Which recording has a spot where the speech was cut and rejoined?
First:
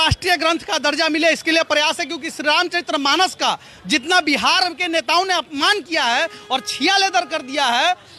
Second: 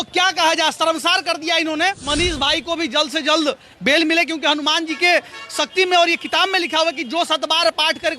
second; 1 cut; at 2.0 s

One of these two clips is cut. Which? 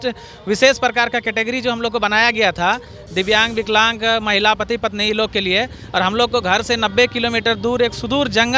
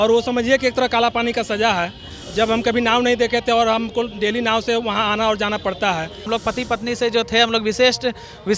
second; 1 cut; at 6.3 s

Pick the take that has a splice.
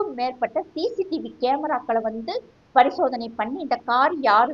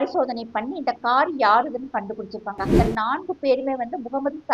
second; 1 cut; at 2.7 s

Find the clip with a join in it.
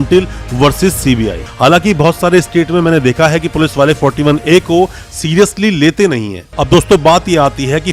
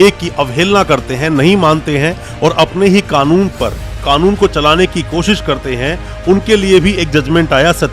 first; 2 cuts; at 1.4 s, 6.6 s

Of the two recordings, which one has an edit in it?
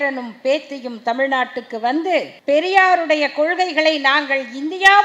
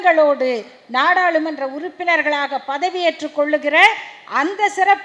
first; 1 cut; at 2.3 s

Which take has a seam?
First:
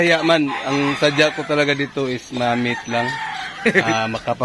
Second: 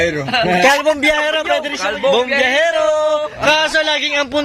second; 1 cut; at 1.8 s

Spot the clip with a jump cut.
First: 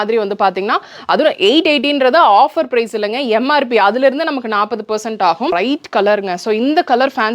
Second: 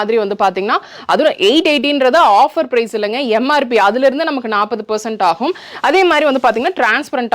first; 1 cut; at 5.5 s

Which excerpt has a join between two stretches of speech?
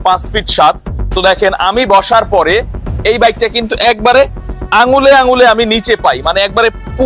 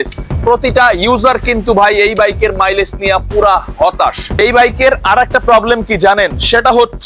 second; 1 cut; at 4.2 s

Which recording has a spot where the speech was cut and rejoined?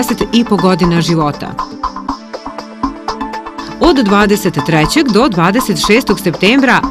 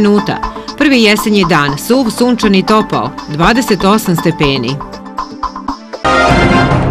second; 1 cut; at 5.9 s

